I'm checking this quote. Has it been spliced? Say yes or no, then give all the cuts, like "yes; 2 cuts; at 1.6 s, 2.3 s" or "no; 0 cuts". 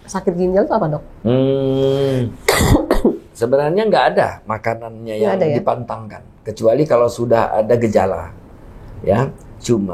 no; 0 cuts